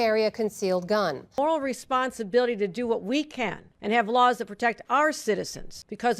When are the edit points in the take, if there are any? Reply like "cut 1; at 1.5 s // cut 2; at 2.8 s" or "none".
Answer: cut 1; at 1.2 s